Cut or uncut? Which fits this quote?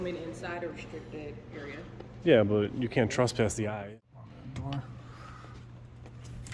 cut